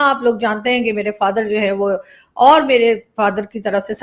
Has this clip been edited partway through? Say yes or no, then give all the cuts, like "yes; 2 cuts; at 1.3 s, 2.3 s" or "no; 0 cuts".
no; 0 cuts